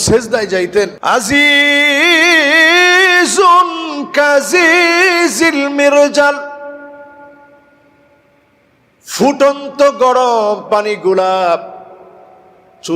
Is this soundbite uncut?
no; 1 cut; at 1.0 s

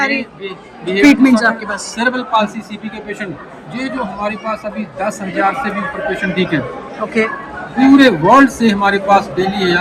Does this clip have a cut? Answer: no; 0 cuts

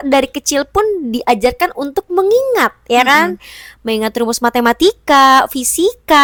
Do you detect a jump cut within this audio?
no; 0 cuts

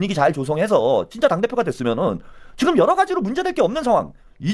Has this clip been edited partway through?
no; 0 cuts

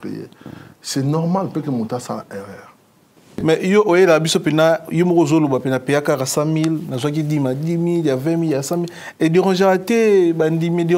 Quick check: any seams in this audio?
yes; 1 cut; at 3.1 s

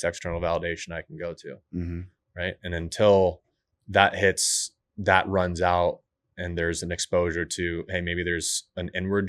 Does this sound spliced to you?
no; 0 cuts

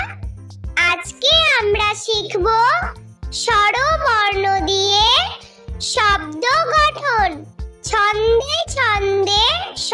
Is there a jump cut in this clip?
no; 0 cuts

